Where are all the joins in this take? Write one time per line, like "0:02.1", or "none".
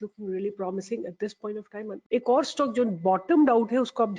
0:01.9